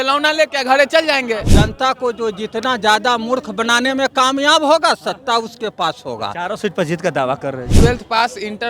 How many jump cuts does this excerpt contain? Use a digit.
2